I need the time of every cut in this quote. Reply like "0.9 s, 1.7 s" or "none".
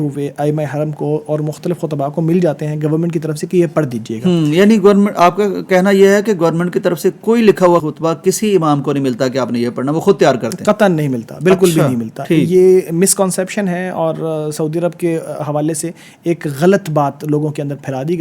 none